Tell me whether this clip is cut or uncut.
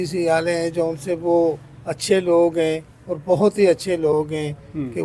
uncut